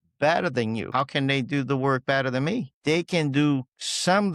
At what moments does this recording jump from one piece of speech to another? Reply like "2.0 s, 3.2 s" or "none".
0.9 s, 2.7 s